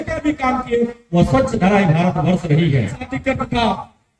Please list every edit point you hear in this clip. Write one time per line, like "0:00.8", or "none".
0:03.0